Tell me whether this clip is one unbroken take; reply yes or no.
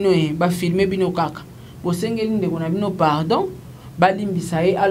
yes